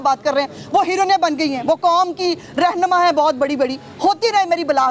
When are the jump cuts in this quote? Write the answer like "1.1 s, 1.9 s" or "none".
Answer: none